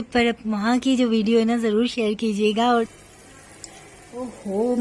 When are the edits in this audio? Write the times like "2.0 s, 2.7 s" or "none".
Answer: 2.9 s

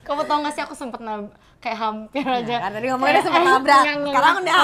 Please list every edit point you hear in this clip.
none

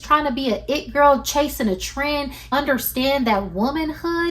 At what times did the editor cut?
2.4 s

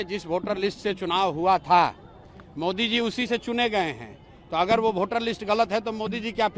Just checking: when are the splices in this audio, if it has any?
none

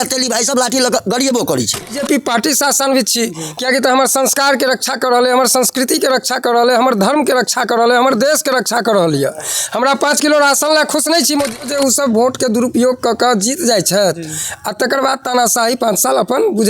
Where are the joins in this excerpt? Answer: 2.0 s, 11.6 s

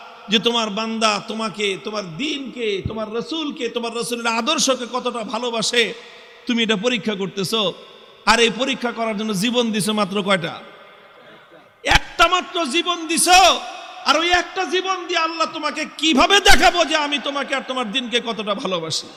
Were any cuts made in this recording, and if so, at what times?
none

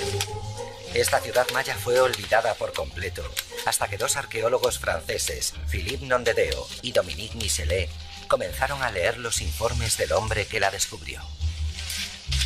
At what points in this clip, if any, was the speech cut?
8.9 s

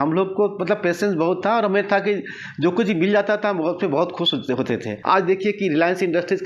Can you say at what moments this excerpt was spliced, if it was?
4.9 s

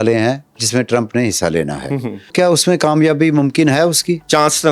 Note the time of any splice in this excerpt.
2.3 s

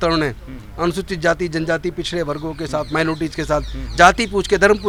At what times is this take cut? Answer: none

